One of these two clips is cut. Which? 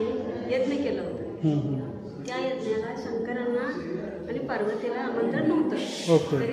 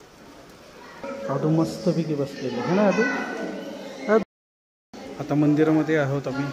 second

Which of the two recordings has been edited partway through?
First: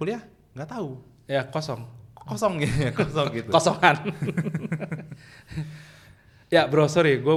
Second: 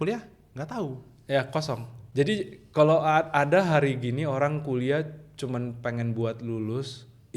second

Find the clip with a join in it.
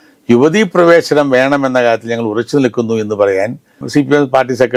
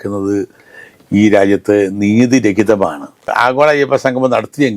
second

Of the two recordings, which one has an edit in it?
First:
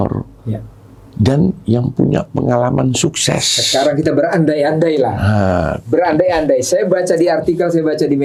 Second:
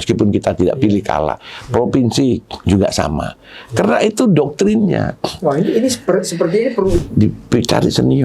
second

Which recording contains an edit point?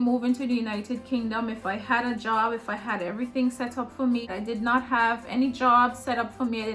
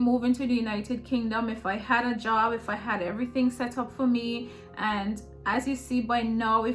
first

